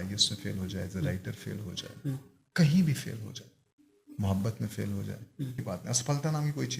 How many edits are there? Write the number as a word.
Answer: one